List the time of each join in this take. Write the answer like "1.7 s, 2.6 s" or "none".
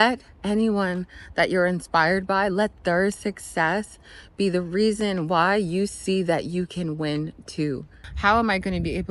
8.0 s